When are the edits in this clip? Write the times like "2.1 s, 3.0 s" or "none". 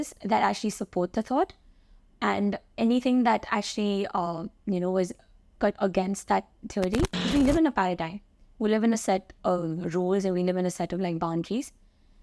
7.3 s